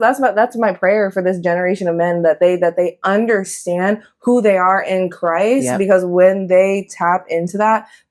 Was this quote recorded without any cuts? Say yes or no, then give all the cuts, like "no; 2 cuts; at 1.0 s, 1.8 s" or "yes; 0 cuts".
yes; 0 cuts